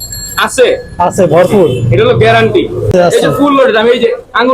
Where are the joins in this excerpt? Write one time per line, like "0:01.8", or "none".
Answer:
0:02.9